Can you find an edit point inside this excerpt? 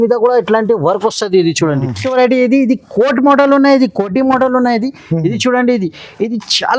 yes; 1 cut; at 1.9 s

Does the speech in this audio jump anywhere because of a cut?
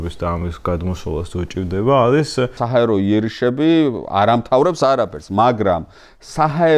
yes; 1 cut; at 2.6 s

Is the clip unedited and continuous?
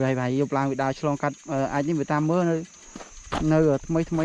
yes; 0 cuts

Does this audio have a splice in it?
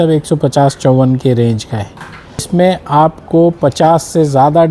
yes; 1 cut; at 2.5 s

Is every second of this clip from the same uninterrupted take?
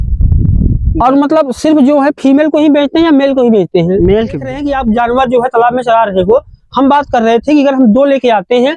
no; 1 cut; at 4.6 s

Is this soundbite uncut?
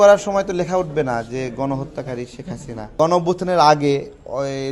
no; 1 cut; at 2.9 s

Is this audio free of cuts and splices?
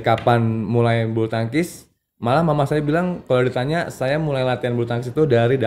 yes; 0 cuts

